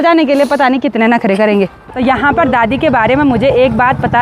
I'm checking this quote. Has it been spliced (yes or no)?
yes